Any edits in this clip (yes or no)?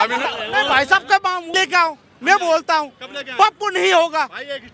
yes